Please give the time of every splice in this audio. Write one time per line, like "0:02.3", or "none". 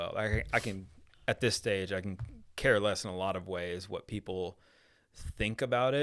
none